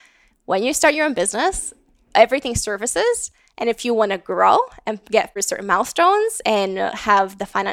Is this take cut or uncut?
cut